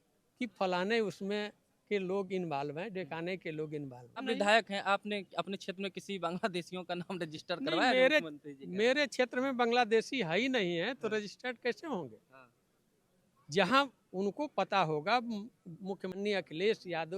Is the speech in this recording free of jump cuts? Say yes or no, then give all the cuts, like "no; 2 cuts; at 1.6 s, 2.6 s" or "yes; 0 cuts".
no; 2 cuts; at 4.2 s, 16.2 s